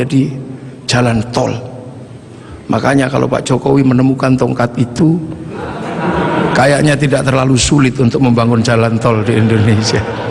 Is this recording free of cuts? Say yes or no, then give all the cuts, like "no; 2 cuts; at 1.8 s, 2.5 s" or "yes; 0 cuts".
yes; 0 cuts